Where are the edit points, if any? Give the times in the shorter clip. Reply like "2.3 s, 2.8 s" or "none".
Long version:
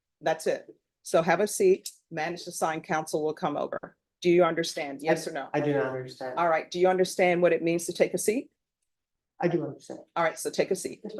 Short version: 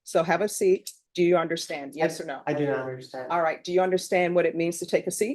1.0 s